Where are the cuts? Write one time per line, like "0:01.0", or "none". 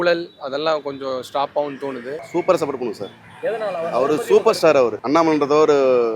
0:02.2
0:05.0